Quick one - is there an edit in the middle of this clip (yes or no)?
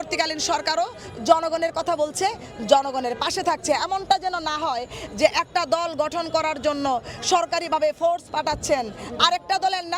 no